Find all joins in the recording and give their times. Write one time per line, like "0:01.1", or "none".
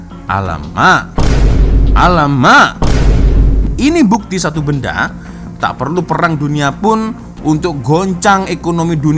0:03.6